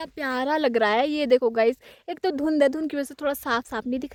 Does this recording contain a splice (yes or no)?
no